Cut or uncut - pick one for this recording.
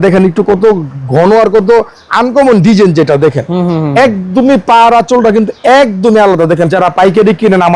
cut